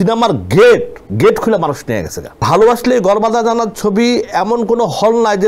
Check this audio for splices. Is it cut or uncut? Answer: cut